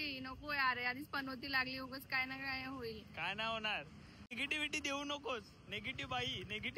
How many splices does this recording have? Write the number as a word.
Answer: one